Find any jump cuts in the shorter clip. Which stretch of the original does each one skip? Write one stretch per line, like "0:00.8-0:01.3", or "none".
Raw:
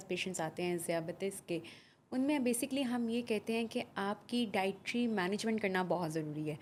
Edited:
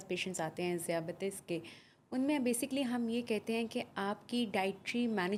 none